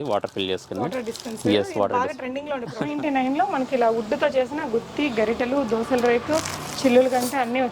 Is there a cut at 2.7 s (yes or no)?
yes